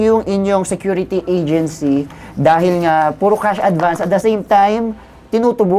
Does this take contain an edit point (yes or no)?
no